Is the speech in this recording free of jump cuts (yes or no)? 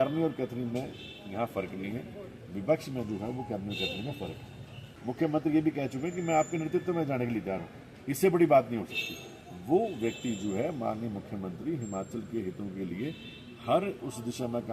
no